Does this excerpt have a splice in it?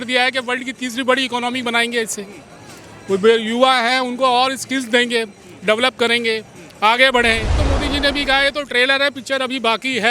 yes; 1 cut; at 7.6 s

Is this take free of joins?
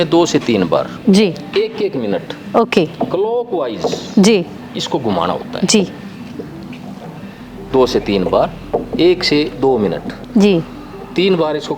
yes; 0 cuts

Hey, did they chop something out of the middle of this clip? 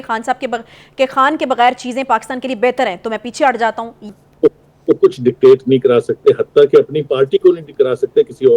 yes; 1 cut; at 3.9 s

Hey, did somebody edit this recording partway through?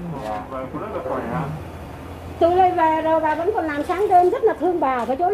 no; 0 cuts

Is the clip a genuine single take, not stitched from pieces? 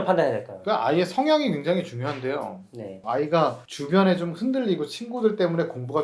no; 1 cut; at 3.0 s

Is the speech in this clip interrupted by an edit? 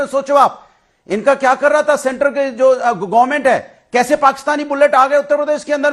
no; 0 cuts

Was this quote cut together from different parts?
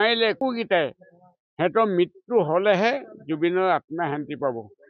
no; 0 cuts

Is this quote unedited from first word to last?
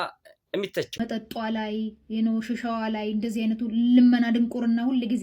no; 1 cut; at 1.0 s

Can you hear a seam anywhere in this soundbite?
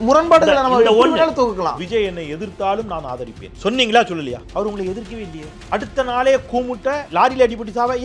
yes; 5 cuts; at 1.8 s, 3.4 s, 4.4 s, 5.5 s, 7.0 s

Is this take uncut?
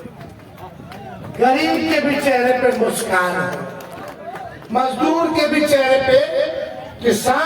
yes; 0 cuts

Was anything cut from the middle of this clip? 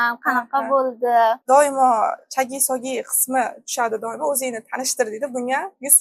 yes; 1 cut; at 1.4 s

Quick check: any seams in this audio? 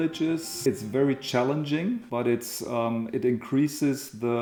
no; 0 cuts

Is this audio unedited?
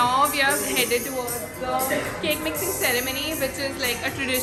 yes; 0 cuts

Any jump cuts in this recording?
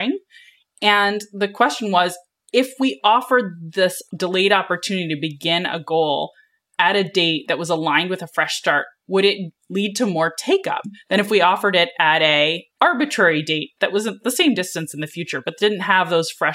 yes; 2 cuts; at 4.0 s, 9.5 s

